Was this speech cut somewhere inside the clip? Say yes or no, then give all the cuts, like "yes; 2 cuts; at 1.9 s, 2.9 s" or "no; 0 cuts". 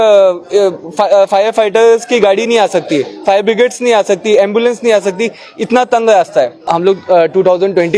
yes; 1 cut; at 6.7 s